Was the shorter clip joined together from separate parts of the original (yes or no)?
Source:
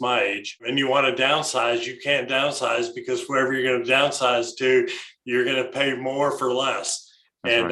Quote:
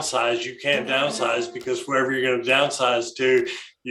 no